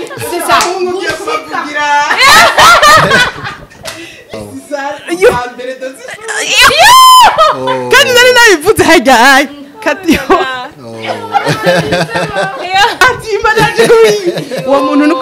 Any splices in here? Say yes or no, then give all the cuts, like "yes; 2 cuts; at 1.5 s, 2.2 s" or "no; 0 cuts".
yes; 2 cuts; at 4.4 s, 13.0 s